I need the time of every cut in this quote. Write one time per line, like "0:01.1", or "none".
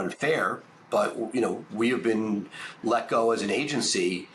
none